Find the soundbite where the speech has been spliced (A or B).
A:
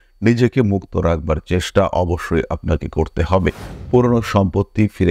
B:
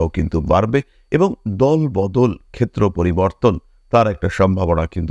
A